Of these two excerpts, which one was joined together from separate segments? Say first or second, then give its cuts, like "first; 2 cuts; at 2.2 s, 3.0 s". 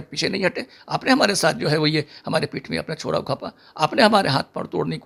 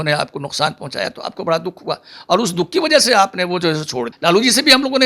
second; 1 cut; at 4.1 s